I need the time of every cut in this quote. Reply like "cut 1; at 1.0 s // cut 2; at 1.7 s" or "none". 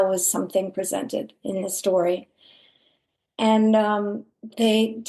none